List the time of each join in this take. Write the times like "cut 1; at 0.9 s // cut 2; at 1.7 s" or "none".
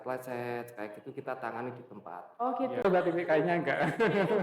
cut 1; at 2.8 s